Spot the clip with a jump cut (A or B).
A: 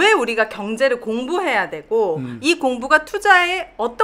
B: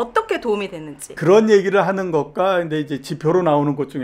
B